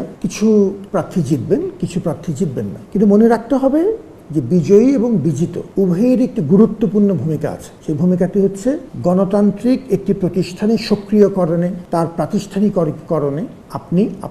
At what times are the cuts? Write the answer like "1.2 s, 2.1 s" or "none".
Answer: none